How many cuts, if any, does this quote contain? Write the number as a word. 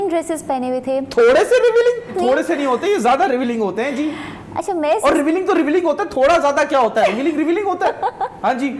zero